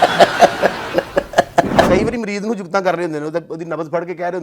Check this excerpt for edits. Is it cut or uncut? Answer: cut